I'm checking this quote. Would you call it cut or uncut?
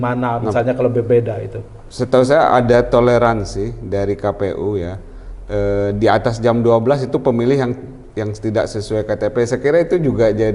uncut